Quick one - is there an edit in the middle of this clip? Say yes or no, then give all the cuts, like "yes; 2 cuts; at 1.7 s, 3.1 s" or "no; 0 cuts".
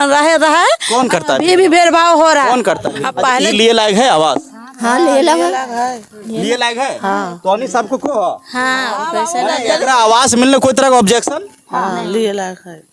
yes; 1 cut; at 3.4 s